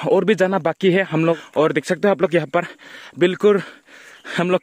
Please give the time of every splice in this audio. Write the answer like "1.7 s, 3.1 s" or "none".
1.4 s